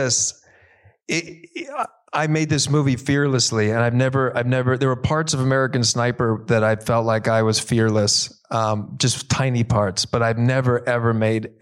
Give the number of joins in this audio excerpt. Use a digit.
0